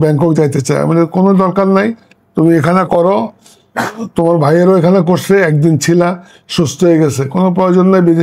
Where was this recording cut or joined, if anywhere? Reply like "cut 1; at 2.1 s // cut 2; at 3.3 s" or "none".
none